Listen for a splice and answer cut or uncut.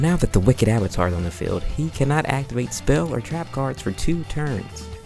uncut